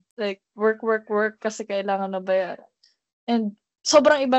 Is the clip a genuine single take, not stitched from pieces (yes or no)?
yes